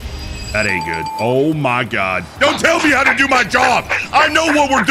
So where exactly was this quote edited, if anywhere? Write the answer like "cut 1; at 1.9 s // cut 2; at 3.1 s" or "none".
cut 1; at 2.3 s